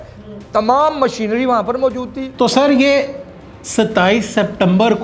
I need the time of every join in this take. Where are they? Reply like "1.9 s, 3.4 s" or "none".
2.2 s